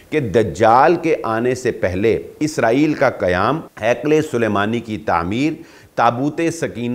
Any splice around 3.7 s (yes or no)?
yes